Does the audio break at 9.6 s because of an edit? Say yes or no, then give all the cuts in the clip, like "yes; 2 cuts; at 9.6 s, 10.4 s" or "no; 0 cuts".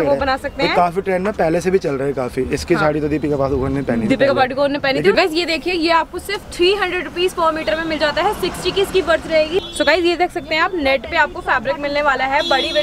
yes; 2 cuts; at 5.1 s, 9.6 s